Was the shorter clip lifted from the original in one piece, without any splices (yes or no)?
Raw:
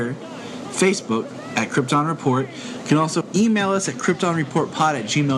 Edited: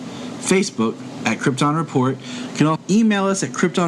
no